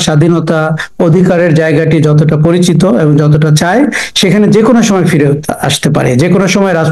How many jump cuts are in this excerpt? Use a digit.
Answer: 0